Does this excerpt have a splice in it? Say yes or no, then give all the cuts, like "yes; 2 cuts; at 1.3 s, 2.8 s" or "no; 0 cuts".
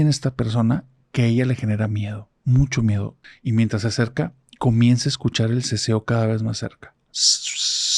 yes; 1 cut; at 3.2 s